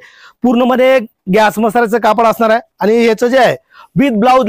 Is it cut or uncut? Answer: uncut